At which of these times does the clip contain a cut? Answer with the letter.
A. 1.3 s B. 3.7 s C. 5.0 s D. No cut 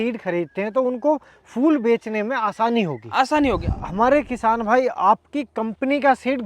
B